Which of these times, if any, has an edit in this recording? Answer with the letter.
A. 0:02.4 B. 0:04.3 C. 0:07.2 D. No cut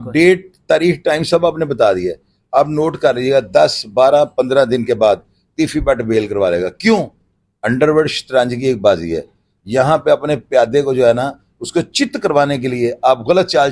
D